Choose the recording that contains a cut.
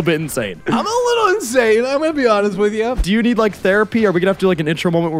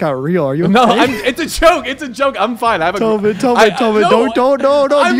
first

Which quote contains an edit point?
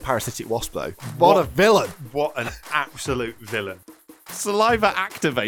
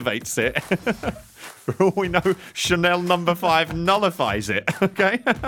first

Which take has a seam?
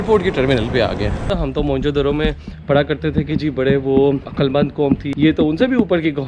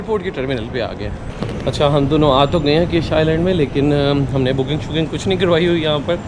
first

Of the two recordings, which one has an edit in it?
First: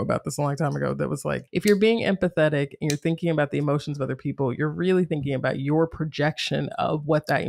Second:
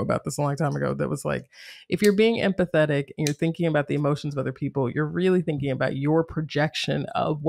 first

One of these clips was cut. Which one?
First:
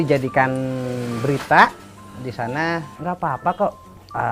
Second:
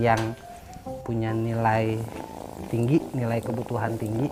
first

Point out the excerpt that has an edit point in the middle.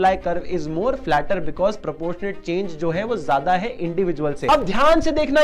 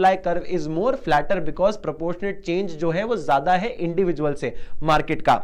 first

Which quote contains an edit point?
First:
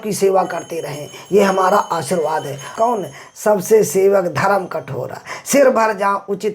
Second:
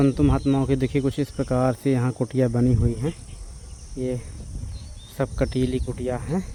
first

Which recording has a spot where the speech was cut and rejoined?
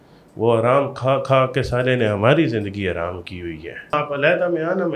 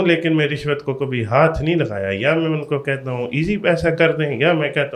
first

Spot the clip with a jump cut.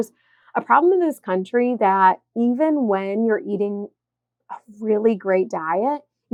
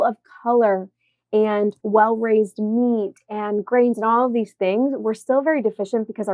second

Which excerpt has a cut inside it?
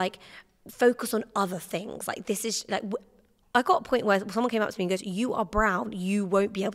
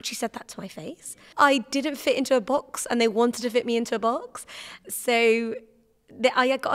second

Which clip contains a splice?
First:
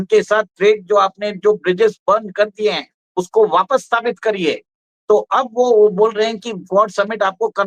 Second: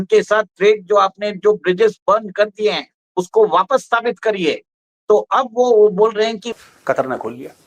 second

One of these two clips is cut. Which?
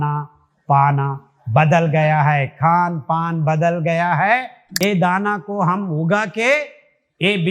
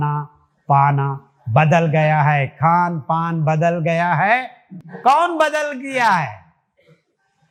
first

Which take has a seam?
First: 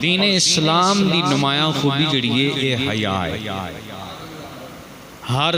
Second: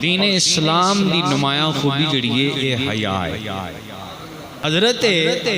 second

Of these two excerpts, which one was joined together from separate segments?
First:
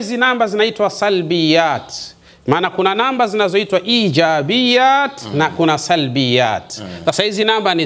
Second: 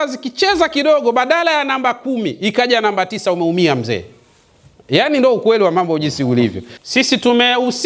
second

